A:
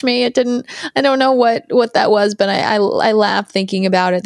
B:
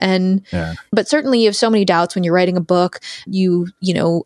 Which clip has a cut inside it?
B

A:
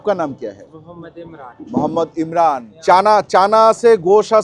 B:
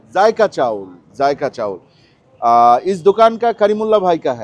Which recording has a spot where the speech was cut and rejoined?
A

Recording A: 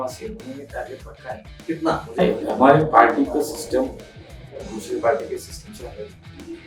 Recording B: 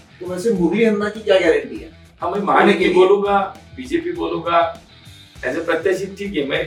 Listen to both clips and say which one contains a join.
A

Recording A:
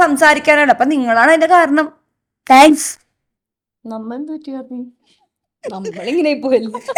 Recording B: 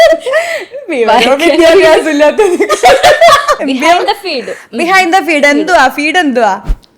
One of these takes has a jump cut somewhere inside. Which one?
B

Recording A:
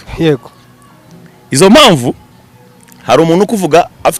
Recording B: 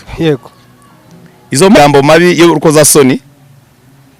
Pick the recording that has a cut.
B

